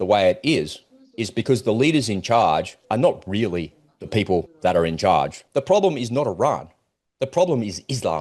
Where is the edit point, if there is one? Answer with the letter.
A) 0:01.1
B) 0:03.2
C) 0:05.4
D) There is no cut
C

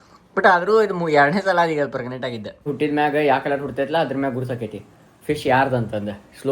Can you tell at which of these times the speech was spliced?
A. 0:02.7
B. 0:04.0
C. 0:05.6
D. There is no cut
A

